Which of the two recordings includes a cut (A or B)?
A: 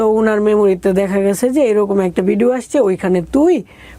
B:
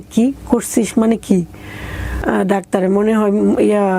B